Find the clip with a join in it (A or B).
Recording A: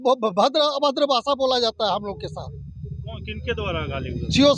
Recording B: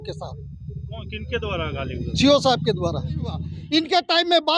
B